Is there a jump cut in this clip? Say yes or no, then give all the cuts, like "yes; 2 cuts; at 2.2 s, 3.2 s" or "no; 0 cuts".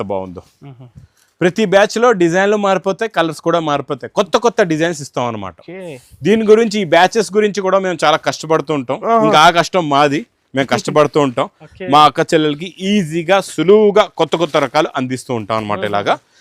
no; 0 cuts